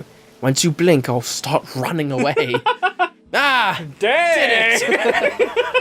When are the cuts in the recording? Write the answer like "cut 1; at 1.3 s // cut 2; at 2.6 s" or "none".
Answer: cut 1; at 3.2 s

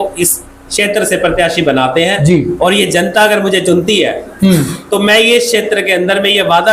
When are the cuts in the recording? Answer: none

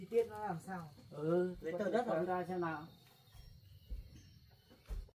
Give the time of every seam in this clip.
none

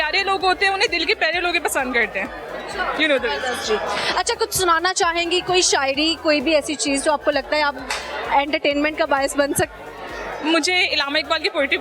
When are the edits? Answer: none

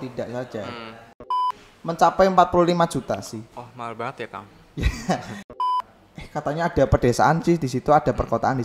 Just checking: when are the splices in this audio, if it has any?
cut 1; at 1.4 s // cut 2; at 5.6 s

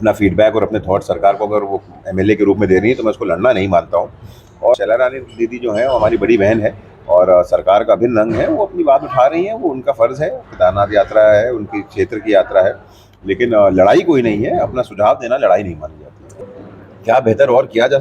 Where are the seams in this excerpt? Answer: cut 1; at 4.7 s // cut 2; at 16.4 s

